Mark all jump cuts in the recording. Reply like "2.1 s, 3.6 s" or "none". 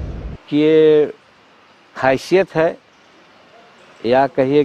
none